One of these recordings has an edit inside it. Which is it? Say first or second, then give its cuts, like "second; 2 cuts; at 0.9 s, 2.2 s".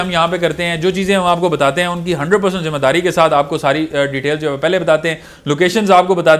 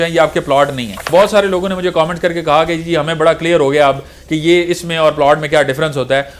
second; 1 cut; at 1.1 s